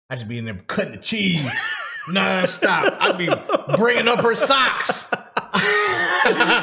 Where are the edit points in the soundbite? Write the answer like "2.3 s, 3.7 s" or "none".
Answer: 5.5 s